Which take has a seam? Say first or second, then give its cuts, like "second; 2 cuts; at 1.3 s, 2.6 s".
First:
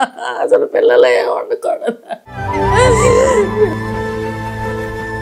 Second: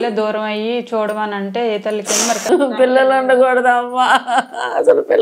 second; 1 cut; at 2.5 s